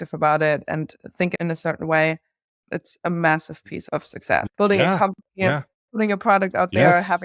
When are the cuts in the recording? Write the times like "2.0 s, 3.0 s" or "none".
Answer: 1.3 s, 2.5 s, 4.5 s